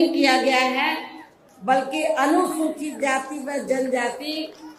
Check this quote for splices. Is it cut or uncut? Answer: uncut